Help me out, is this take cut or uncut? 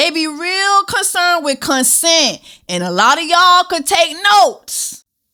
uncut